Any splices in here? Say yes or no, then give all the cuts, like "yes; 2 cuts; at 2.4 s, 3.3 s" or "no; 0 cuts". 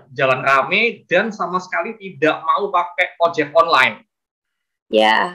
no; 0 cuts